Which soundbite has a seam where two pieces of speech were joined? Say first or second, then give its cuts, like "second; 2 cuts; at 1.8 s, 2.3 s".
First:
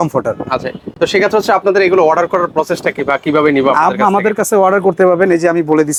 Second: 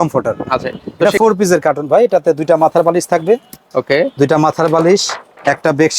second; 1 cut; at 1.1 s